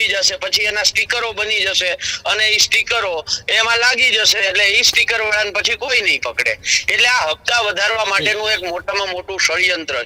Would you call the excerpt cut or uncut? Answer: uncut